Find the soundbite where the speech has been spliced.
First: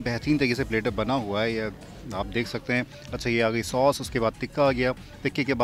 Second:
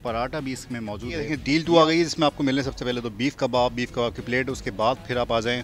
second; 1 cut; at 1.3 s

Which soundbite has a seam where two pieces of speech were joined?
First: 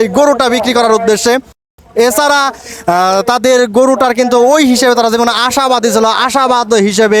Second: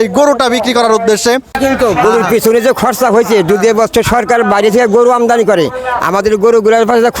second; 1 cut; at 1.5 s

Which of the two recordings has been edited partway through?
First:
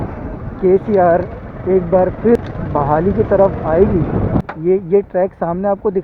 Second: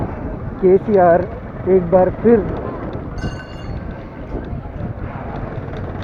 first; 2 cuts; at 2.4 s, 4.5 s

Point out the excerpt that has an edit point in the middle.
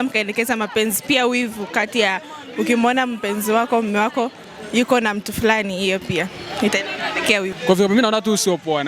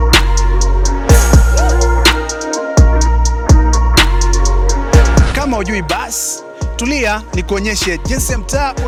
first; 1 cut; at 7.5 s

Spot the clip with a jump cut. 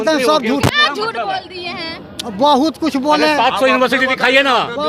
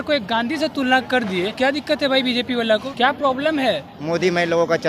second; 3 cuts; at 1.5 s, 2.9 s, 3.9 s

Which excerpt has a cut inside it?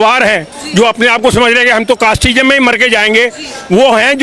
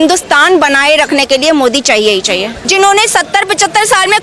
second; 1 cut; at 2.5 s

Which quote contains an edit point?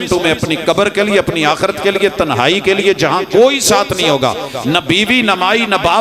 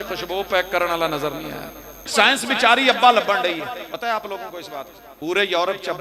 second; 3 cuts; at 2.1 s, 3.9 s, 5.0 s

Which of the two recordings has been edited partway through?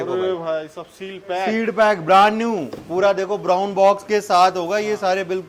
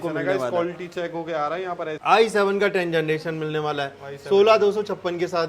second; 1 cut; at 2.0 s

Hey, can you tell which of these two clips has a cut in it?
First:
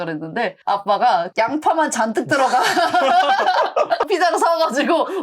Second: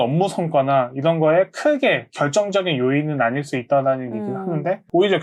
first; 1 cut; at 4.1 s

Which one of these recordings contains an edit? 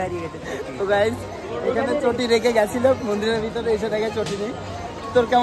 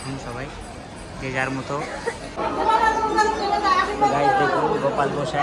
second; 1 cut; at 2.4 s

